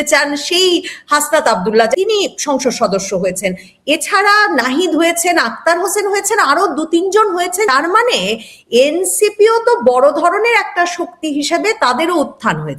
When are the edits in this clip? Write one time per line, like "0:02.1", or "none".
0:02.0
0:07.7

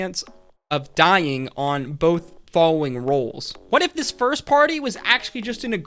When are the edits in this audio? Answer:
0:03.5

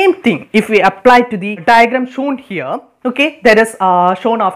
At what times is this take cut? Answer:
0:01.6

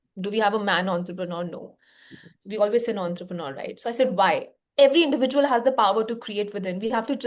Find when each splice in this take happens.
0:04.6

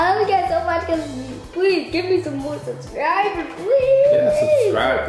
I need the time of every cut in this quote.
none

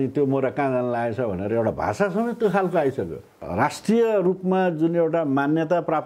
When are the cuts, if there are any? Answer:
0:03.3

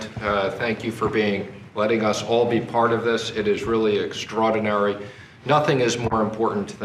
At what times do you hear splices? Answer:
none

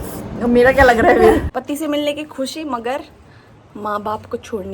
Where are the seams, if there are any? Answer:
0:01.5

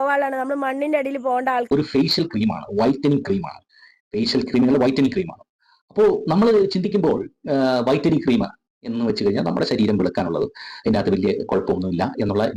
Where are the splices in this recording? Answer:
0:01.7

